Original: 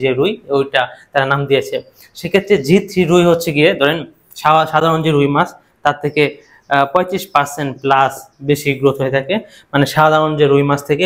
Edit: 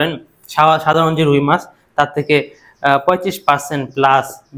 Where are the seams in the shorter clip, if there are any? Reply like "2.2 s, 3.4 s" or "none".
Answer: none